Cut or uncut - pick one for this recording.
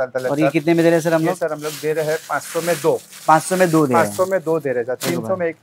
uncut